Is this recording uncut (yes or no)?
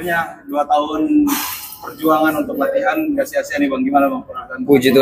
yes